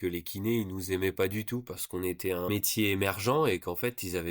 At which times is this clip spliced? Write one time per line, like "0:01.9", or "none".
0:02.5